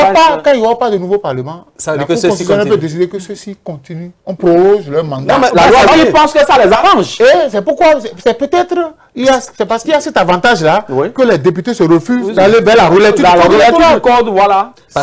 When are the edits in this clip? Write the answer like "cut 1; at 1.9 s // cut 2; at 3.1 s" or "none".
cut 1; at 5.9 s